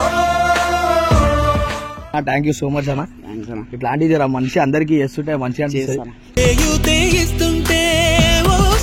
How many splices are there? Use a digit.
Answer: 1